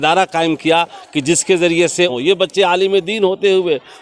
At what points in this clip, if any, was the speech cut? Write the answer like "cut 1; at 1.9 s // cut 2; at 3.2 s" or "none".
cut 1; at 2.1 s